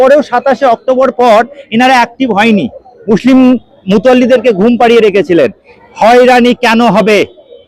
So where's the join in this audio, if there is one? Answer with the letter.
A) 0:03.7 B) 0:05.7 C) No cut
B